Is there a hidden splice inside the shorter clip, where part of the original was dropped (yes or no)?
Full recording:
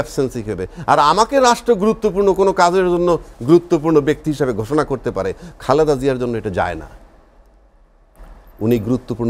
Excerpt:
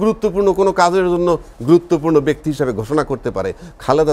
no